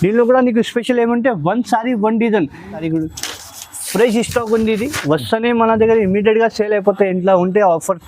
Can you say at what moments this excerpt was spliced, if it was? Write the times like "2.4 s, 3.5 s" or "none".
2.8 s